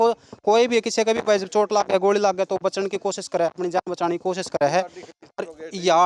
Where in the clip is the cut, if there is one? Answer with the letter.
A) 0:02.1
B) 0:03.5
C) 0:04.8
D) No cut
D